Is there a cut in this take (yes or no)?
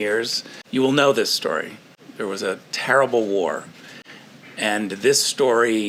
no